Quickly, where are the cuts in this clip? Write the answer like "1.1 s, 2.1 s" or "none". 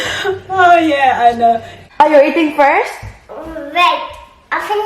1.8 s